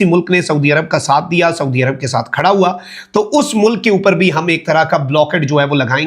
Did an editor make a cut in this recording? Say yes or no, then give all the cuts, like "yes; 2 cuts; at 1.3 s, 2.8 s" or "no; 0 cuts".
no; 0 cuts